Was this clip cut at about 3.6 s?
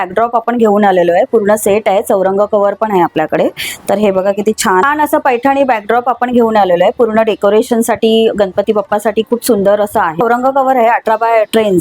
no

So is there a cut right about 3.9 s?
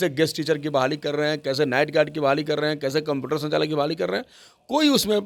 no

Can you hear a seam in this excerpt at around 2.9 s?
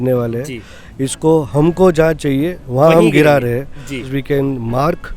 no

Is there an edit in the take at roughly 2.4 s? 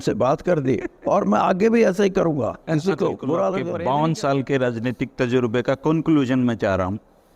no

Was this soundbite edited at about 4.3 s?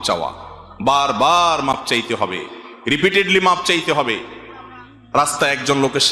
no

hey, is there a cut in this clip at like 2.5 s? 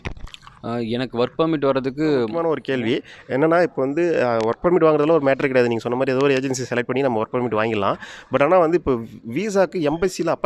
yes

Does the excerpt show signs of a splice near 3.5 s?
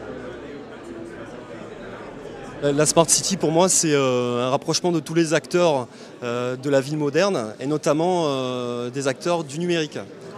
yes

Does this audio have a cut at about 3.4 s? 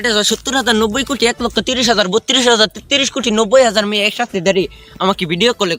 no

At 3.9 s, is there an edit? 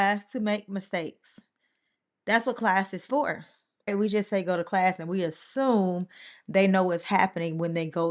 yes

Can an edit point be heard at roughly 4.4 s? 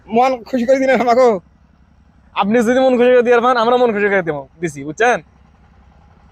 no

